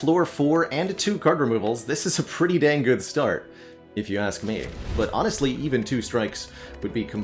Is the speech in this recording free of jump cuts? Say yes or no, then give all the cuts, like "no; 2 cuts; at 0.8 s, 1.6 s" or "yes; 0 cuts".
no; 1 cut; at 4.9 s